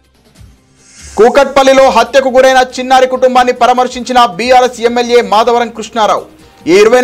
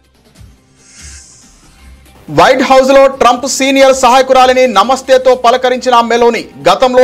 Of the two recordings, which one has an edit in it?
second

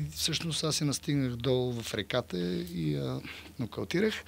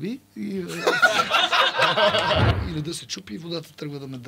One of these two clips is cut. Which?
second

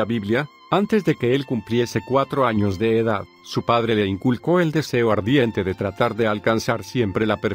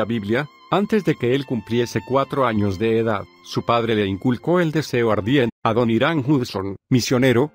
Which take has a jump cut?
first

